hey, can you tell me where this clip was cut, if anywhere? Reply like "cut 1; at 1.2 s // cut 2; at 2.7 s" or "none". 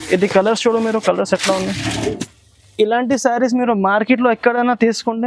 cut 1; at 2.2 s